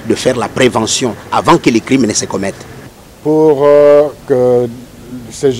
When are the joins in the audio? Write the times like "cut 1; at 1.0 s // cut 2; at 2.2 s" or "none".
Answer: cut 1; at 2.9 s